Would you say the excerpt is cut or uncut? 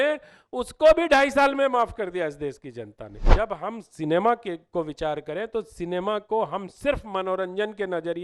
cut